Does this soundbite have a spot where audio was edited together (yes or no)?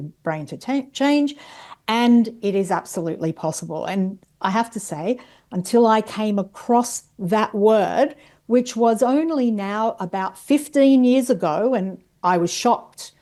no